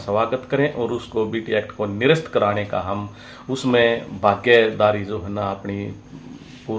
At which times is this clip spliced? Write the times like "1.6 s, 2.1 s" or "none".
none